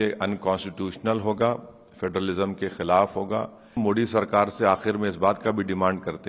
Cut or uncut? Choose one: cut